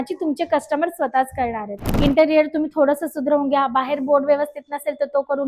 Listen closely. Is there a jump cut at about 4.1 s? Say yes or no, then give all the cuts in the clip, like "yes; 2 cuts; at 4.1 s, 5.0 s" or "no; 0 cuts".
no; 1 cut; at 1.9 s